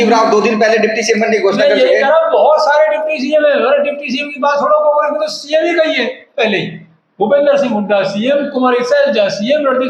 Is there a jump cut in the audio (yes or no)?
no